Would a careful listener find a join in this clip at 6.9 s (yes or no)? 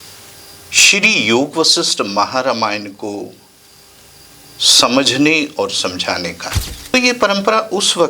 yes